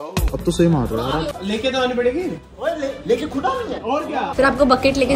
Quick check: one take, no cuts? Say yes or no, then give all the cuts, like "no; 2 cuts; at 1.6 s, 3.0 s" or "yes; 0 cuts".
no; 2 cuts; at 1.4 s, 4.3 s